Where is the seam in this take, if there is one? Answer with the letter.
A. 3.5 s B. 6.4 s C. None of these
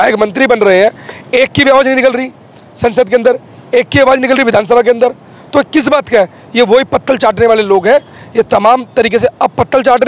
C